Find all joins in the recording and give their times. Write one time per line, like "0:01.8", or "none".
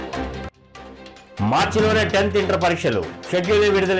none